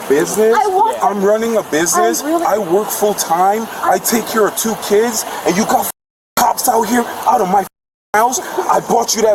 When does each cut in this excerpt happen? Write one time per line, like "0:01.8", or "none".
none